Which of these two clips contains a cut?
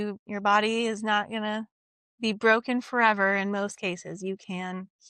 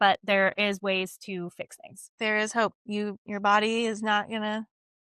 second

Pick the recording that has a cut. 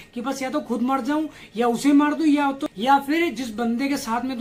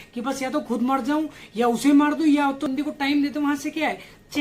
second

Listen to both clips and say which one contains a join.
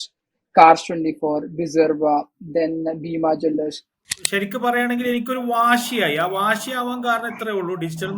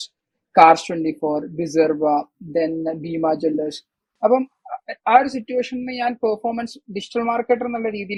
first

